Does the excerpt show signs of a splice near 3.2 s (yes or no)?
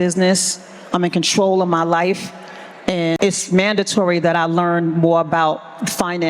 yes